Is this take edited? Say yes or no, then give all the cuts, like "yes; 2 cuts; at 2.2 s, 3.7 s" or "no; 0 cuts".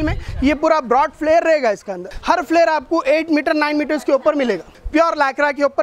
yes; 2 cuts; at 2.1 s, 4.7 s